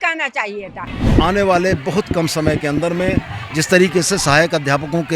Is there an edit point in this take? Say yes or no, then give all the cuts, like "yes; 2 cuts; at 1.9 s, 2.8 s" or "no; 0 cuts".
yes; 1 cut; at 1.0 s